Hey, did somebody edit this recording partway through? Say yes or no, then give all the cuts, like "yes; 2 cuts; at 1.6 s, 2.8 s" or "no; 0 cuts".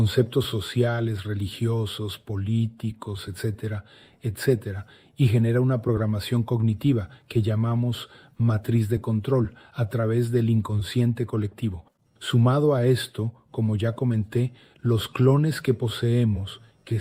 no; 0 cuts